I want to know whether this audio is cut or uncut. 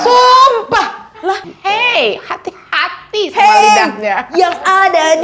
cut